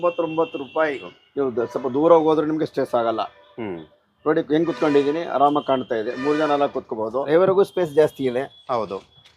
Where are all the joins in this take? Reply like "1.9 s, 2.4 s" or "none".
1.2 s, 7.2 s